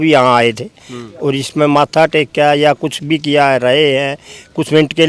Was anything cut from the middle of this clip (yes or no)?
no